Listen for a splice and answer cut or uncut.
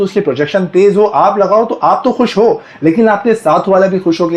uncut